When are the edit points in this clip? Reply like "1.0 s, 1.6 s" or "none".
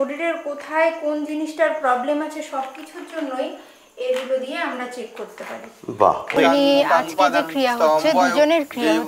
6.4 s